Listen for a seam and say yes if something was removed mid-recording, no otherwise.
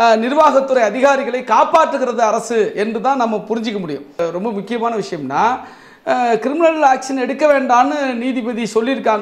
yes